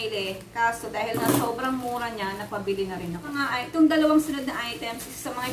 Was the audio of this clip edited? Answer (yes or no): yes